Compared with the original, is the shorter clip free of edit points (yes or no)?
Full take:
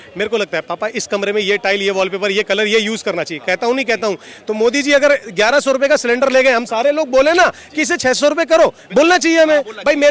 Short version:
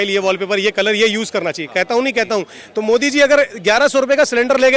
yes